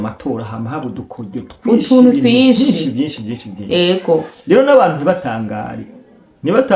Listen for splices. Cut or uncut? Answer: uncut